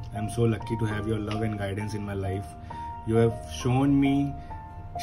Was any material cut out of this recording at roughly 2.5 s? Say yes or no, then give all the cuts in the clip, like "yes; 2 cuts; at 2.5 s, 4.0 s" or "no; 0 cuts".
no; 0 cuts